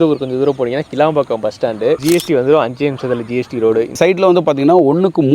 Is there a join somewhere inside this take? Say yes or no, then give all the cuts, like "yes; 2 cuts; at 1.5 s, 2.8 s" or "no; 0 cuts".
yes; 2 cuts; at 2.0 s, 3.9 s